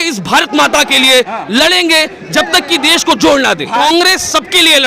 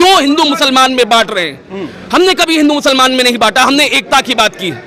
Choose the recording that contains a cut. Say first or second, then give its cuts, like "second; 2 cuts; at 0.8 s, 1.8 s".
first; 1 cut; at 3.8 s